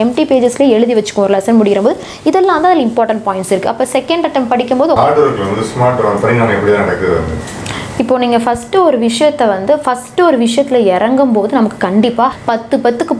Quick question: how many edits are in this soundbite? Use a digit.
2